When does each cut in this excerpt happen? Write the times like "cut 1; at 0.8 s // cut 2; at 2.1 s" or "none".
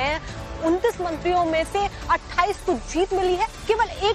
cut 1; at 1.8 s

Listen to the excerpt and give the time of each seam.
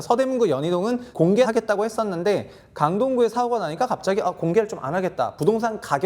cut 1; at 1.3 s

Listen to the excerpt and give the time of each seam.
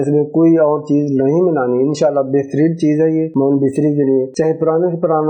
cut 1; at 3.3 s // cut 2; at 4.3 s

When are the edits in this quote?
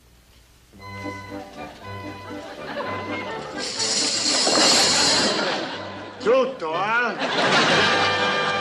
cut 1; at 5.6 s

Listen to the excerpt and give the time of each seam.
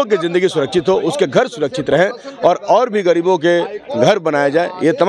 none

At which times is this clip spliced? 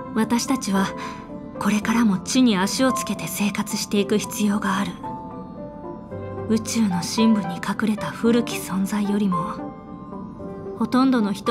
cut 1; at 5.0 s // cut 2; at 6.5 s

